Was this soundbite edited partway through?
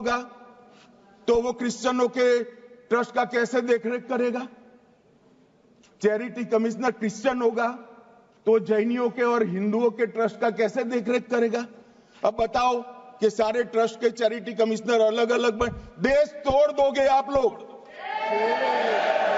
no; 0 cuts

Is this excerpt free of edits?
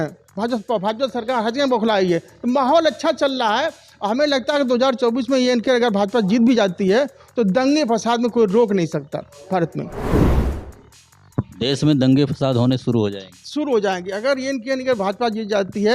yes; 0 cuts

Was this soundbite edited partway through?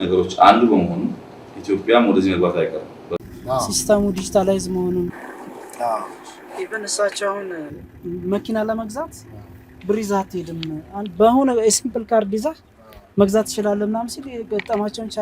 yes; 1 cut; at 3.2 s

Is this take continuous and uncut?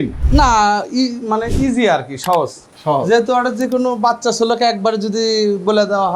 yes; 0 cuts

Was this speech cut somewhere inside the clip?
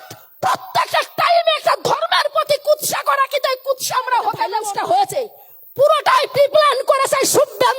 yes; 1 cut; at 4.6 s

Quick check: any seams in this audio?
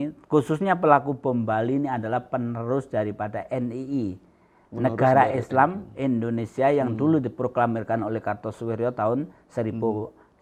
no; 0 cuts

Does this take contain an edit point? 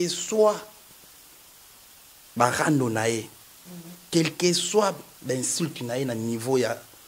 no; 0 cuts

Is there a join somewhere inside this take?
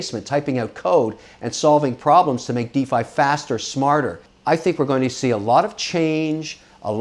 yes; 1 cut; at 4.3 s

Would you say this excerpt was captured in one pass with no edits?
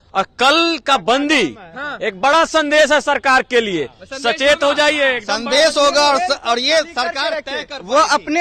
yes; 0 cuts

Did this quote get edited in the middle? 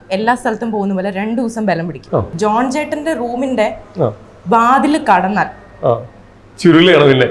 yes; 1 cut; at 2.3 s

